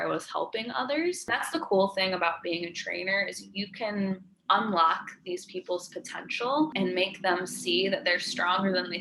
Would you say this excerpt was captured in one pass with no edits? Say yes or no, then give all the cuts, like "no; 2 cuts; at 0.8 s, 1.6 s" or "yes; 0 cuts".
no; 2 cuts; at 1.4 s, 6.7 s